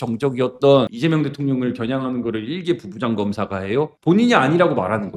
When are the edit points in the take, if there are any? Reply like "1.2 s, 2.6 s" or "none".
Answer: 3.9 s